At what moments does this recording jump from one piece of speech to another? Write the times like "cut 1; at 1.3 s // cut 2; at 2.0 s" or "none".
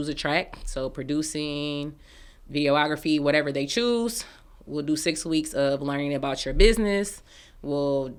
none